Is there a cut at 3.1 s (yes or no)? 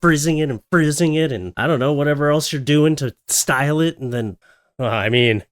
no